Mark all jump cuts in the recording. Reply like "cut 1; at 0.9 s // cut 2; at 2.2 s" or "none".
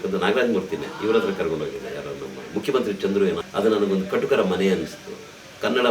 cut 1; at 3.4 s